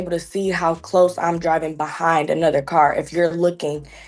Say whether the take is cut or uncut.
uncut